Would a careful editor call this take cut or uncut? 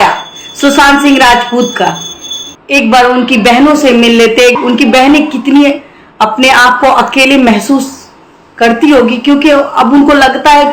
uncut